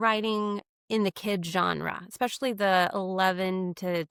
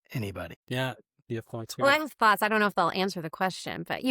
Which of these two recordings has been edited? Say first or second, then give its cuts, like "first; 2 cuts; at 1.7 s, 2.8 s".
second; 1 cut; at 1.1 s